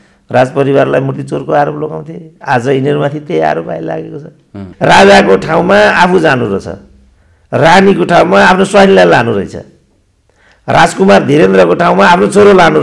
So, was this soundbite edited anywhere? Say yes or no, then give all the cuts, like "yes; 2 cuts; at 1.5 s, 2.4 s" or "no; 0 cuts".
yes; 1 cut; at 4.6 s